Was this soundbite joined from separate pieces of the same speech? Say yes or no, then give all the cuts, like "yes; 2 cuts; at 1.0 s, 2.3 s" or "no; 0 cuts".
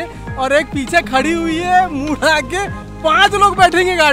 no; 0 cuts